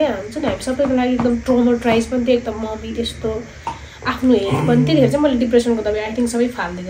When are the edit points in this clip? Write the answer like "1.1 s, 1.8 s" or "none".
none